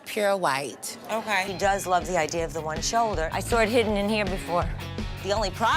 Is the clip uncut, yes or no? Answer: no